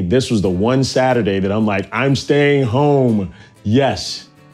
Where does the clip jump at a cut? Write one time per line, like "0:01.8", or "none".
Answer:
none